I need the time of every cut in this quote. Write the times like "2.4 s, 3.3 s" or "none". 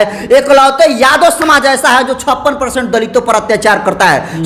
none